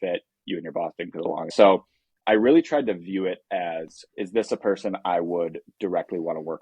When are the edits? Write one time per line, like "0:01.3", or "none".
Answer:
0:01.5
0:04.0